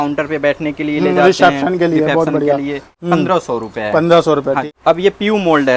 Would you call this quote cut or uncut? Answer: cut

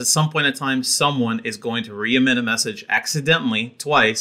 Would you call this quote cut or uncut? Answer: uncut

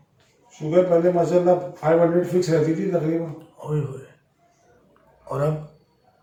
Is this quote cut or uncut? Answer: uncut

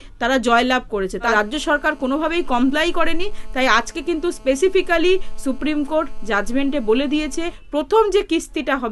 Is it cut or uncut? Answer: cut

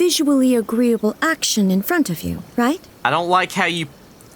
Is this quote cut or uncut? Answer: cut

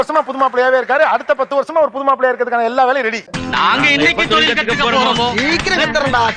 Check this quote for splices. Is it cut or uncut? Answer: uncut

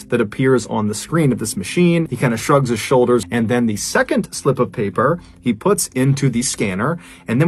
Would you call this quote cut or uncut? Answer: uncut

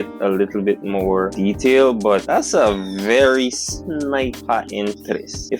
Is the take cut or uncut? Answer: uncut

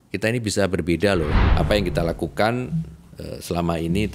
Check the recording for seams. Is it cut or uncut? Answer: cut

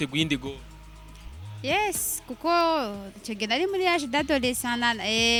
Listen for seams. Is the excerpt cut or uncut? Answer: uncut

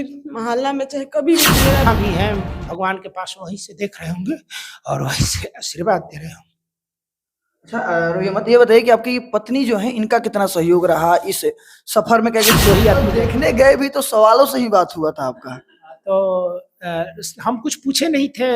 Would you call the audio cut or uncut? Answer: cut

